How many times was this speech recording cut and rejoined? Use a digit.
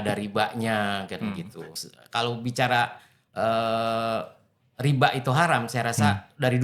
1